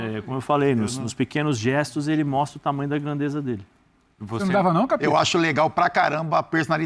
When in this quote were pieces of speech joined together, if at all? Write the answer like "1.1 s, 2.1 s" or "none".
none